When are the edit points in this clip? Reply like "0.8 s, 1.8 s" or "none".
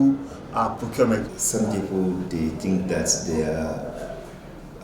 1.3 s